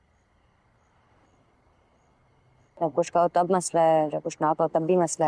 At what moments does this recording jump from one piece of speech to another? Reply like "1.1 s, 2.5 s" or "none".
1.0 s